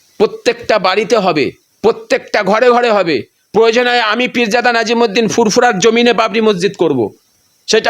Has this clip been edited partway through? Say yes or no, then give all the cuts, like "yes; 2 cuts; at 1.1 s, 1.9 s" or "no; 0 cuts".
no; 0 cuts